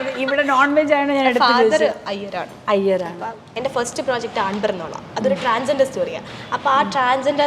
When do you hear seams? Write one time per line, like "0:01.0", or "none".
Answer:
0:03.5